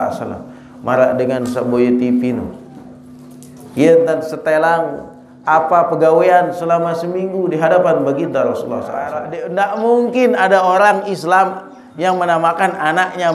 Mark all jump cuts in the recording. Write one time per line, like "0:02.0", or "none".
0:09.4